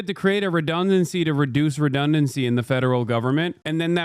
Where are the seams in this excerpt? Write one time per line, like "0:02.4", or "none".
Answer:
none

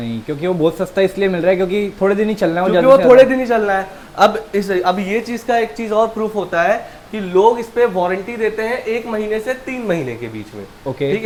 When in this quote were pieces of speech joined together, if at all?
none

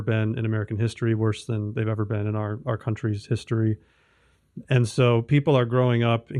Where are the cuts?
none

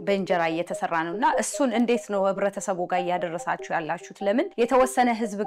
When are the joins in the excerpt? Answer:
0:04.5

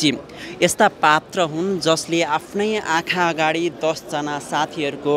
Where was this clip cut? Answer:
none

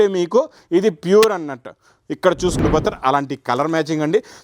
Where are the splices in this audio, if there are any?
0:02.6

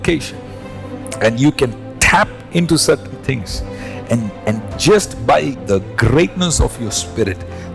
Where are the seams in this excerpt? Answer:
0:05.6

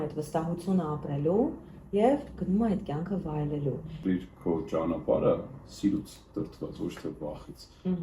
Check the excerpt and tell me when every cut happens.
0:04.0

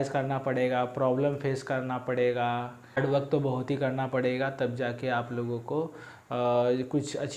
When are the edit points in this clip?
0:03.0

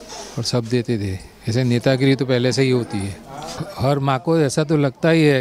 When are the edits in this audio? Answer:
0:03.6

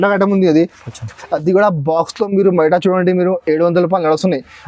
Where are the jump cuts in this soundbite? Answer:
none

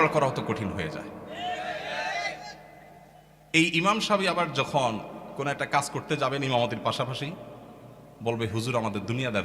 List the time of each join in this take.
none

